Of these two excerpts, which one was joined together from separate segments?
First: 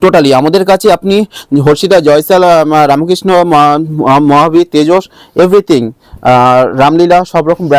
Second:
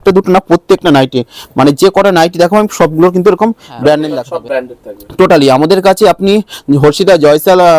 second; 1 cut; at 4.1 s

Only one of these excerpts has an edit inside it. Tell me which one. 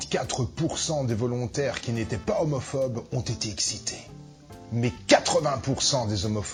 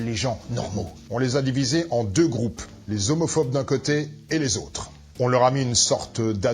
second; 1 cut; at 0.9 s

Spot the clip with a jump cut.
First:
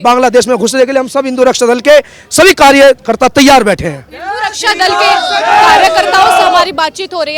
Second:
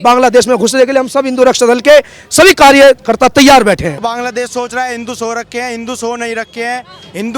second; 1 cut; at 4.0 s

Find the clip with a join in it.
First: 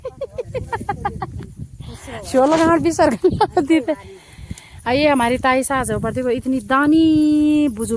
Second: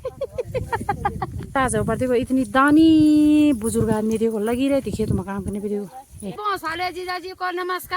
second; 2 cuts; at 1.5 s, 6.4 s

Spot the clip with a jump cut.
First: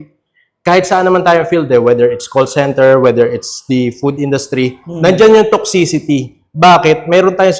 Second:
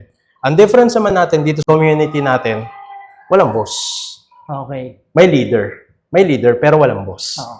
second; 1 cut; at 1.6 s

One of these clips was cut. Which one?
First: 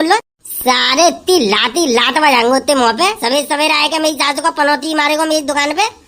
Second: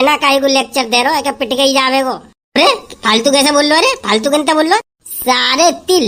first; 1 cut; at 3.2 s

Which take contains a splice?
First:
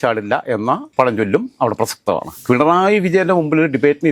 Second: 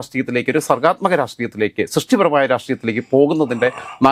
first; 1 cut; at 2.3 s

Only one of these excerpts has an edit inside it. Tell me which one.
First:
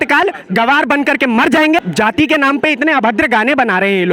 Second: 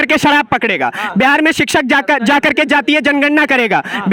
first; 1 cut; at 1.9 s

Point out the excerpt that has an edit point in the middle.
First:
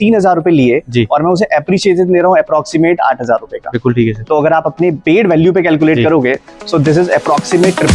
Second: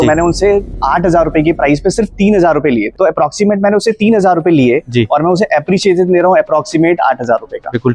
second; 1 cut; at 2.9 s

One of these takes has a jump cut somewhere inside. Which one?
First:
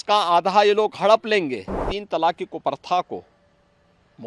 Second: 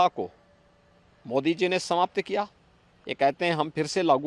first; 1 cut; at 1.9 s

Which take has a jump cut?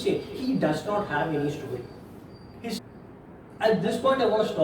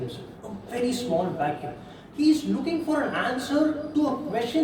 first; 1 cut; at 2.8 s

